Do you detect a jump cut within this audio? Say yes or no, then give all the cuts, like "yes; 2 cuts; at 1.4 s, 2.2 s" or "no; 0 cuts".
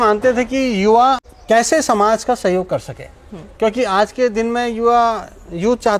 yes; 1 cut; at 1.3 s